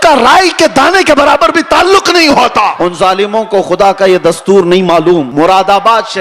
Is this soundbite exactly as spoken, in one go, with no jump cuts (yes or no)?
no